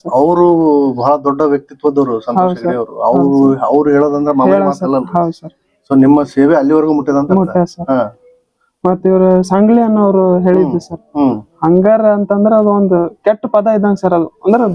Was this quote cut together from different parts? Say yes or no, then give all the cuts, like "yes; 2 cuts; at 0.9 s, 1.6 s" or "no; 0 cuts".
no; 0 cuts